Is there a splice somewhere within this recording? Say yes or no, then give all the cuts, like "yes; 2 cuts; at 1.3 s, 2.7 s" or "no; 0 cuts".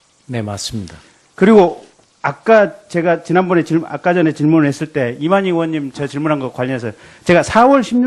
no; 0 cuts